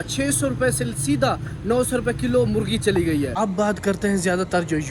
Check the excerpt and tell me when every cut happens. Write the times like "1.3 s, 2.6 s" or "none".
3.3 s